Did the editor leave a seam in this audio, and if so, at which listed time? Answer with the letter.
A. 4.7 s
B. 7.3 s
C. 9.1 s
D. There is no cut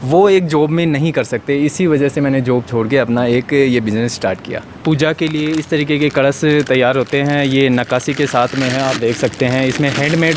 A